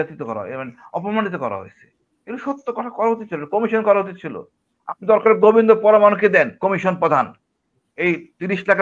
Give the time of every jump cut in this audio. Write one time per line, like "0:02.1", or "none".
none